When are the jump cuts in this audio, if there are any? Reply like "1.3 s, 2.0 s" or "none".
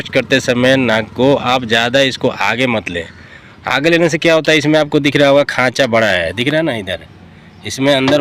none